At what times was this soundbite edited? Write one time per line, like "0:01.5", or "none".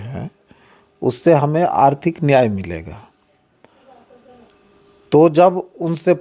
none